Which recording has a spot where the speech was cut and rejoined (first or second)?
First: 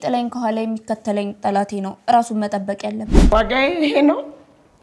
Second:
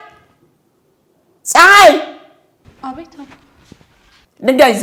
first